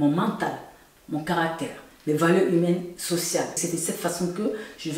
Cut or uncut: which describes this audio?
cut